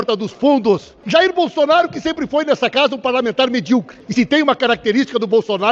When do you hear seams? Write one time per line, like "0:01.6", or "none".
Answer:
0:00.9
0:04.0